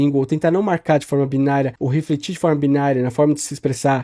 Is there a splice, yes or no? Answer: yes